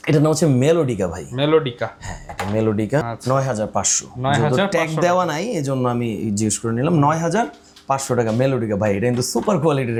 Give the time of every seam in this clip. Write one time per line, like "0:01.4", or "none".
none